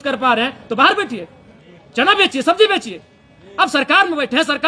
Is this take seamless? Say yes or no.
yes